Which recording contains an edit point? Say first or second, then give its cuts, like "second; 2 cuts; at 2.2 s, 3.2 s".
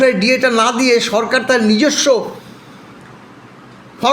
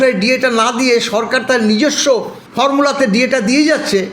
second; 1 cut; at 2.4 s